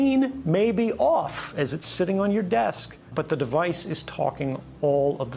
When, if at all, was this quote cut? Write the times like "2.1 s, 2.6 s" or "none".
3.1 s